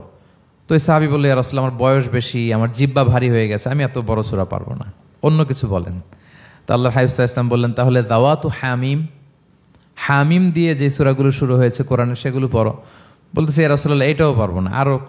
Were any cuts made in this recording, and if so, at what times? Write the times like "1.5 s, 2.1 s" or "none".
none

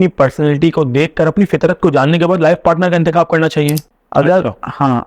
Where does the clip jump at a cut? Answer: 3.9 s

